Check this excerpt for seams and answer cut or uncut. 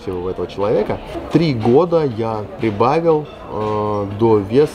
cut